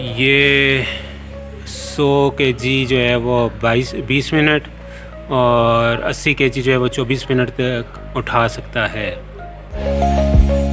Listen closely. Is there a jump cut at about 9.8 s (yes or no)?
yes